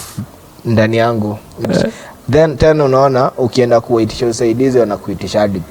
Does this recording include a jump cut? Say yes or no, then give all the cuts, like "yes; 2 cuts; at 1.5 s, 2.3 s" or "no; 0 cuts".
yes; 1 cut; at 1.7 s